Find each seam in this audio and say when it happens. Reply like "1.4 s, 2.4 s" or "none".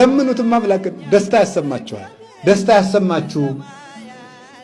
none